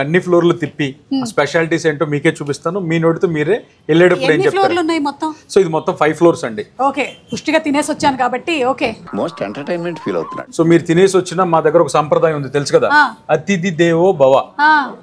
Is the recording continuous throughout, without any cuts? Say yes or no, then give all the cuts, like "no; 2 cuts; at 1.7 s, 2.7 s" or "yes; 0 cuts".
yes; 0 cuts